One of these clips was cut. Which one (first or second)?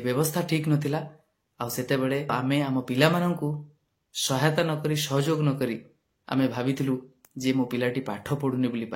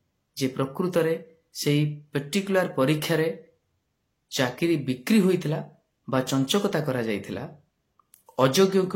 first